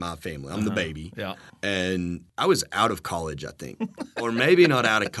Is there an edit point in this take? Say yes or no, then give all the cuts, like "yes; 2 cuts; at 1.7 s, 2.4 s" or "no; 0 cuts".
yes; 3 cuts; at 1.5 s, 2.3 s, 4.1 s